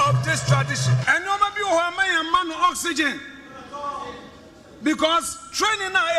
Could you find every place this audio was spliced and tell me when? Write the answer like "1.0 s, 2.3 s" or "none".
1.0 s